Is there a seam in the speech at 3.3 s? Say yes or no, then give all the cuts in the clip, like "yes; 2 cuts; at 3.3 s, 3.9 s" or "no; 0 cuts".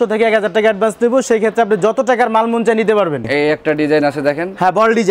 yes; 1 cut; at 3.3 s